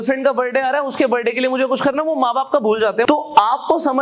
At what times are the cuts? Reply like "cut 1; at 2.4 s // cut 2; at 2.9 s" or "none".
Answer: cut 1; at 3.1 s